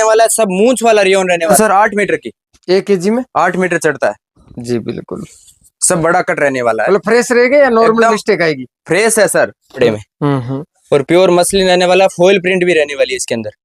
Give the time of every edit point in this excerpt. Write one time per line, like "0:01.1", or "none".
0:01.6
0:09.8